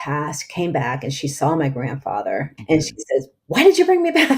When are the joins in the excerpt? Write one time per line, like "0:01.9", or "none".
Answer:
0:02.5